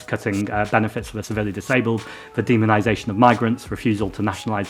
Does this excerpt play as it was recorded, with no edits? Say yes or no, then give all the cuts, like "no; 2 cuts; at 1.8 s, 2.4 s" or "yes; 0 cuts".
no; 1 cut; at 1.2 s